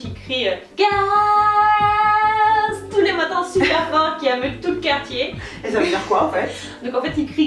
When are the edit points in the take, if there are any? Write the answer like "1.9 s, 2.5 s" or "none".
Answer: none